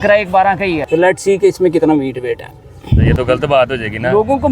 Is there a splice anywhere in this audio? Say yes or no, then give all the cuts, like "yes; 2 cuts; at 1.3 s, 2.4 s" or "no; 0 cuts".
yes; 2 cuts; at 0.8 s, 3.1 s